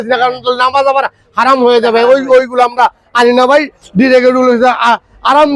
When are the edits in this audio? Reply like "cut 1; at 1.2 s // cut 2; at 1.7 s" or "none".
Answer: none